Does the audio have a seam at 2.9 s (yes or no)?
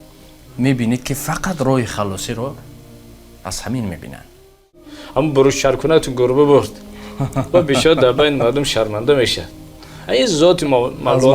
no